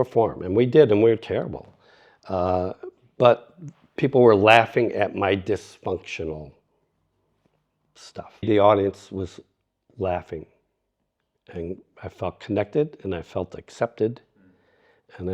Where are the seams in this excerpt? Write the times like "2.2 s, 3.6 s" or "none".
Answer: 8.5 s